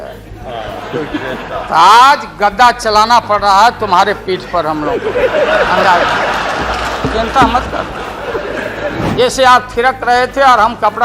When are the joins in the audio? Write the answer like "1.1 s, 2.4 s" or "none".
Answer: 9.0 s